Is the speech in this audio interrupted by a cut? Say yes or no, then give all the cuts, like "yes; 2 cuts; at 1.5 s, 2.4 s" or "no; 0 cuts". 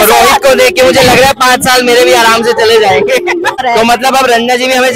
yes; 1 cut; at 3.6 s